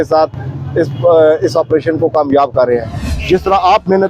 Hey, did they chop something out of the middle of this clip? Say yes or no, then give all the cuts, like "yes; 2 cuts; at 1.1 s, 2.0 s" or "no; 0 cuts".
yes; 1 cut; at 3.1 s